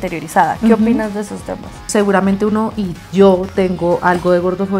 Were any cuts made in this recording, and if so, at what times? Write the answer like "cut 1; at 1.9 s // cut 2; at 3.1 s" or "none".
cut 1; at 1.8 s